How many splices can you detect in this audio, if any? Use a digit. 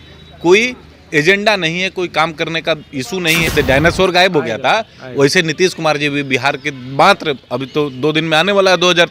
1